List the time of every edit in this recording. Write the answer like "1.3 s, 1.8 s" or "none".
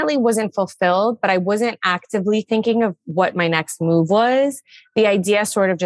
none